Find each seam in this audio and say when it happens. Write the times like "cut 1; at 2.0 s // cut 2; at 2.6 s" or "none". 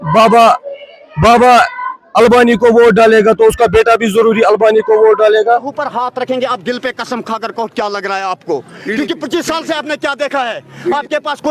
cut 1; at 5.4 s